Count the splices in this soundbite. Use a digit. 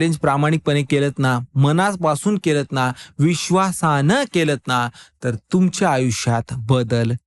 0